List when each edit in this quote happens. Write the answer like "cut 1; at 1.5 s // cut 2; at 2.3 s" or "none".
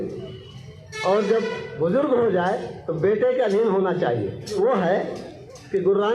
cut 1; at 4.6 s